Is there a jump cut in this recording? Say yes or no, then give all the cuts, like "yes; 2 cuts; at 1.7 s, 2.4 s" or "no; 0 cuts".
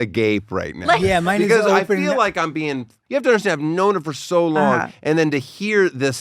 yes; 1 cut; at 3.0 s